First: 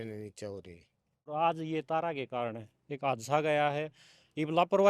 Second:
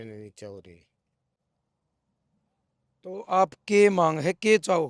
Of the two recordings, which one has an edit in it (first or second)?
first